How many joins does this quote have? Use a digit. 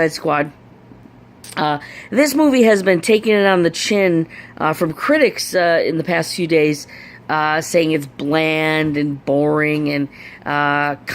1